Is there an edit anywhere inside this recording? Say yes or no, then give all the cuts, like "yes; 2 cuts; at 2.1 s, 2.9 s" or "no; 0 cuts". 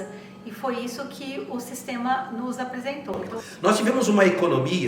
yes; 1 cut; at 3.2 s